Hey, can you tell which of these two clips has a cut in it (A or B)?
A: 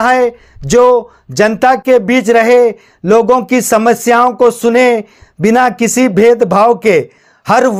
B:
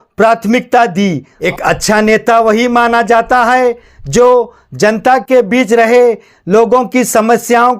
B